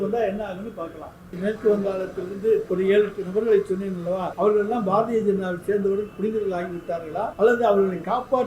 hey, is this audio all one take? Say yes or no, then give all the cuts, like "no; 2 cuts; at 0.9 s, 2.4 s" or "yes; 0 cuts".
no; 4 cuts; at 1.3 s, 2.7 s, 4.3 s, 7.3 s